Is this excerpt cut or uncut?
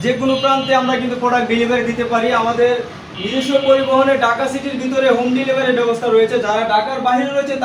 uncut